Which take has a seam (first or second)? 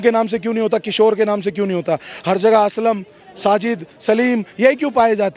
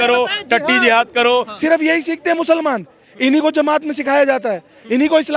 second